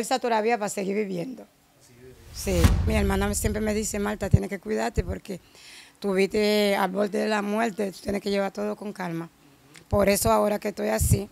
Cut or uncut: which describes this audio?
cut